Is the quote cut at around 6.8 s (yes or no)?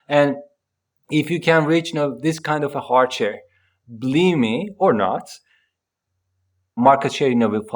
yes